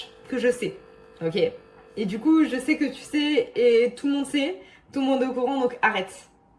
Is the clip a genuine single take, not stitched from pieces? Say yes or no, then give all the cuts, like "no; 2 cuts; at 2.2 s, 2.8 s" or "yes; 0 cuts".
yes; 0 cuts